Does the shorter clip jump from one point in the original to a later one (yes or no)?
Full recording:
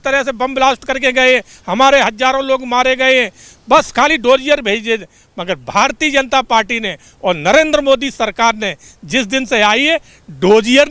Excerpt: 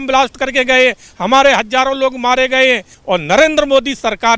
yes